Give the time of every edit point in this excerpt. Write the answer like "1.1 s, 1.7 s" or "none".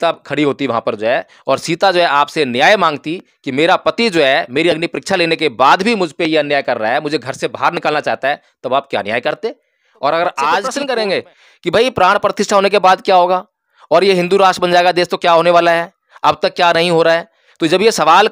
10.7 s